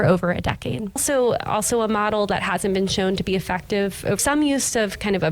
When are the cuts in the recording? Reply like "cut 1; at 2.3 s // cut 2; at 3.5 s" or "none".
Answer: cut 1; at 1.0 s // cut 2; at 4.2 s